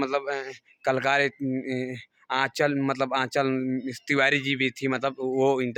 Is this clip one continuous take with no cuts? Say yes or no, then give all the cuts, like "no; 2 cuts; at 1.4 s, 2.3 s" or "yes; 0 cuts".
yes; 0 cuts